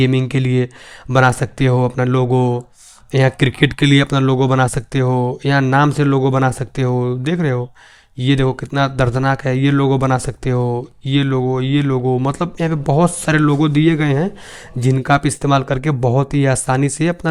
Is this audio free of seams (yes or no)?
yes